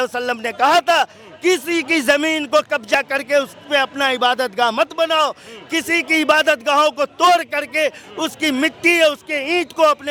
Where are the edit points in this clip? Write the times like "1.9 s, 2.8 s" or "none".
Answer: none

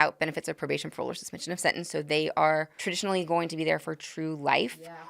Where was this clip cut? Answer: 2.8 s

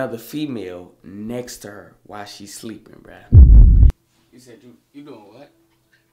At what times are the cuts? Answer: 3.9 s

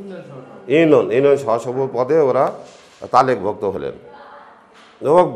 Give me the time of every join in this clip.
none

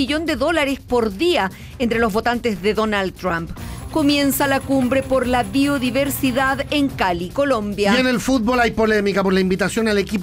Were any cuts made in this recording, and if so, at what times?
none

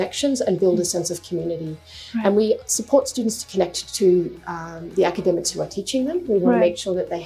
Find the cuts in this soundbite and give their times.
none

